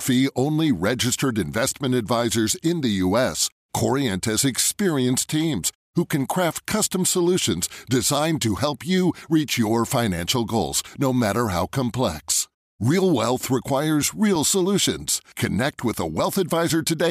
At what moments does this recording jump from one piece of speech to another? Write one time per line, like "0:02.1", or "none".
none